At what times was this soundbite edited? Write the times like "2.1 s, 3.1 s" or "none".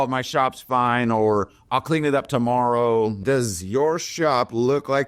3.2 s